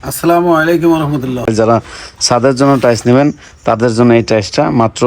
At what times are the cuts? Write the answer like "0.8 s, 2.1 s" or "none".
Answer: 1.5 s